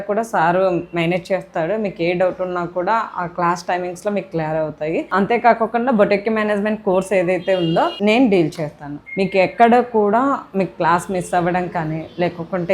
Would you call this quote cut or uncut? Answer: uncut